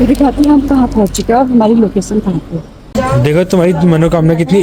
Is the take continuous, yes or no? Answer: no